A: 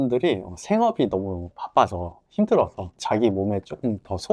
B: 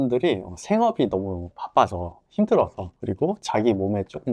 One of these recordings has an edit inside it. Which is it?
A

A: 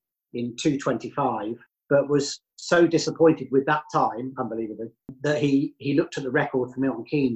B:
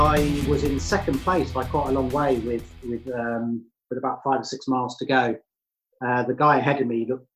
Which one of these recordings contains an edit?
A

